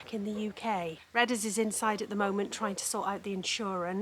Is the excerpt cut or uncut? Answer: cut